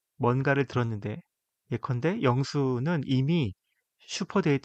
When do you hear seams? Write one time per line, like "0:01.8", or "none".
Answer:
none

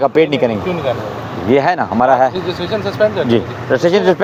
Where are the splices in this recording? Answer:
none

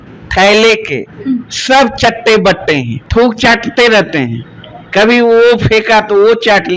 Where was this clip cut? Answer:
0:03.0

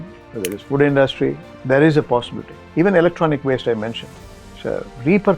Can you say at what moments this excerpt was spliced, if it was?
0:01.5

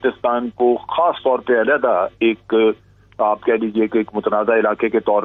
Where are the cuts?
none

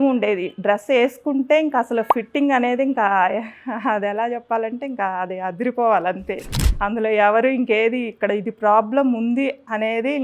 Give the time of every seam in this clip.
none

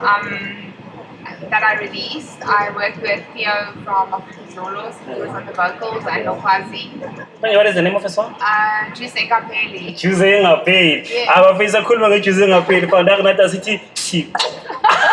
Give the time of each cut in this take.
none

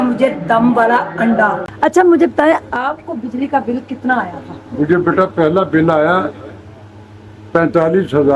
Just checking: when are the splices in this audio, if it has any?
0:01.7

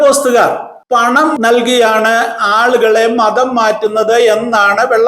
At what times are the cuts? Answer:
0:01.2

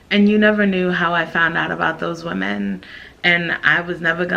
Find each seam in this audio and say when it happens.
none

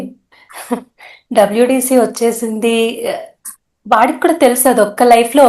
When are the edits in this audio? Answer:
none

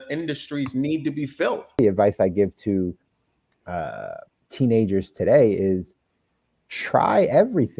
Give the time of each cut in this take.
0:01.8

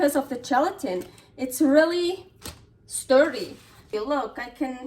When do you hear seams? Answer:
0:03.9

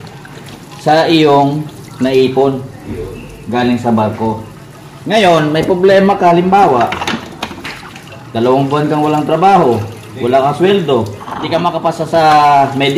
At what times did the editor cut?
0:11.3

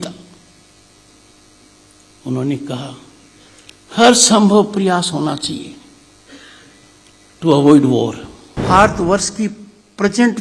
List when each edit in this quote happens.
0:08.6

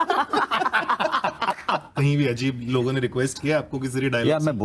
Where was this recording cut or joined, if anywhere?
0:01.9

